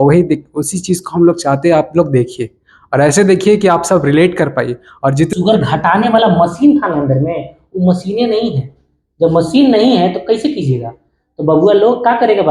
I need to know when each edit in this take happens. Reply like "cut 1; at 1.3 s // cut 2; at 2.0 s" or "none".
cut 1; at 5.3 s